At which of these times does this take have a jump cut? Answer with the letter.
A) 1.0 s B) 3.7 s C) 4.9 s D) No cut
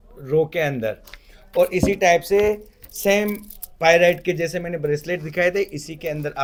D